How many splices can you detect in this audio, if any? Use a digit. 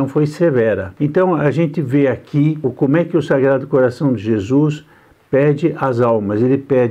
2